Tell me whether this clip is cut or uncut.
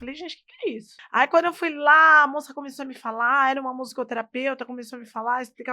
cut